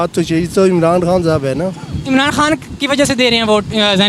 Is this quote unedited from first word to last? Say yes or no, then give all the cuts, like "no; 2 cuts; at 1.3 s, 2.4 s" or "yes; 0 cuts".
yes; 0 cuts